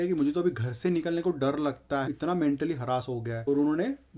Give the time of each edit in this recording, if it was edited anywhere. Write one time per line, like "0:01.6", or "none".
0:02.1
0:03.3